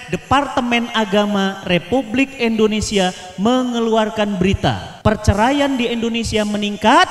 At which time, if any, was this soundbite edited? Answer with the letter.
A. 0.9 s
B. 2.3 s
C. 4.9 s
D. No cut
C